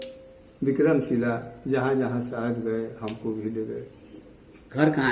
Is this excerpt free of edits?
yes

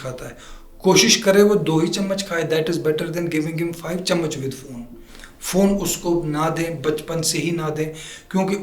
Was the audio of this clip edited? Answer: no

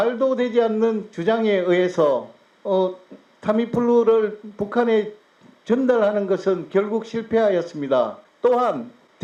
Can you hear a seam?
no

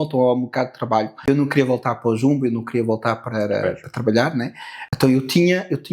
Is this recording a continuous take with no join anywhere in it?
no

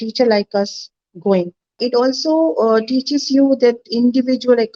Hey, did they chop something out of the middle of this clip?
yes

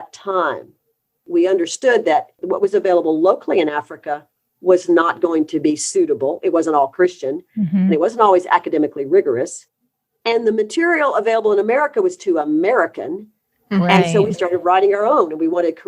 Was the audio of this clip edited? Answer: yes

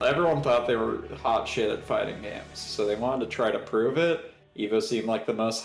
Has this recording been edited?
no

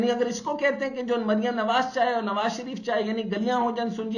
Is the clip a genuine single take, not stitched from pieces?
yes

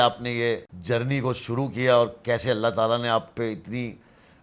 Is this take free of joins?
yes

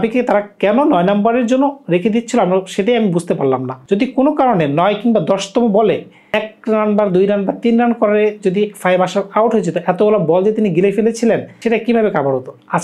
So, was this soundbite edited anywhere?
no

